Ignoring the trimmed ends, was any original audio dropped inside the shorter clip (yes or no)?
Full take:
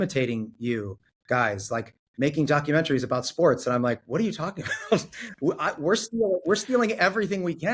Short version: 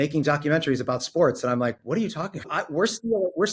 yes